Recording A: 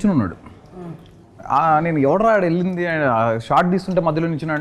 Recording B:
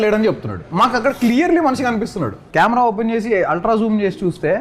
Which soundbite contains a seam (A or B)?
B